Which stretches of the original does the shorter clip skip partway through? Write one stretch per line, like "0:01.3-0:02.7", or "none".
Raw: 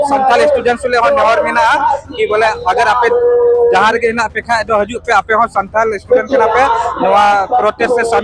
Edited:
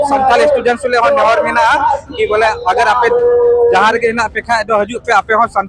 none